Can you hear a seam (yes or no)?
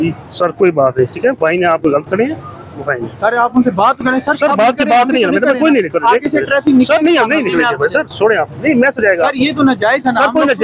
no